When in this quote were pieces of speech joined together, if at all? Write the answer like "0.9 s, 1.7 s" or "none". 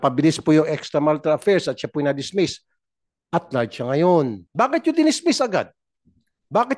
4.4 s